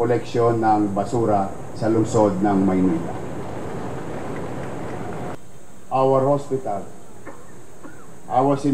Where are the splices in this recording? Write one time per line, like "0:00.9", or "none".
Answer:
0:05.3